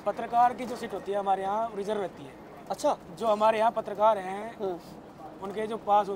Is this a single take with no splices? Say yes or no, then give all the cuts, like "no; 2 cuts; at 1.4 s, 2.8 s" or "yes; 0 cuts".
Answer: yes; 0 cuts